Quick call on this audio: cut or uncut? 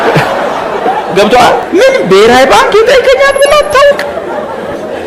cut